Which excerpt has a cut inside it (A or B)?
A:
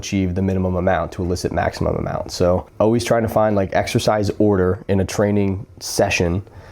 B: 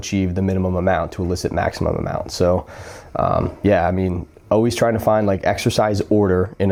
A